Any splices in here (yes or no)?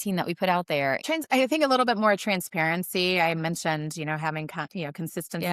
yes